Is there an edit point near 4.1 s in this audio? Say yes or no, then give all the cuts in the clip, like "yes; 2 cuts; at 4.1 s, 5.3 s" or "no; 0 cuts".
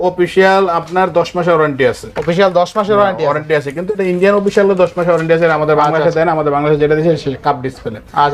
no; 0 cuts